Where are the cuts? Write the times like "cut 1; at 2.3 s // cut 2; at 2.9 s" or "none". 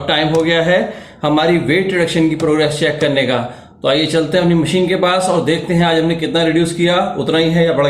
none